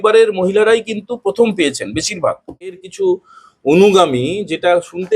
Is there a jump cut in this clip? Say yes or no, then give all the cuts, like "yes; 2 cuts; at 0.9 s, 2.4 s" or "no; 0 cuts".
yes; 1 cut; at 2.9 s